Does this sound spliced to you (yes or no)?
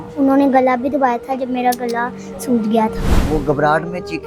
yes